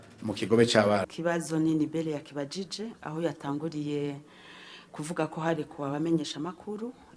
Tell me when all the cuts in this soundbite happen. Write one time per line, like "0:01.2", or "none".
0:01.0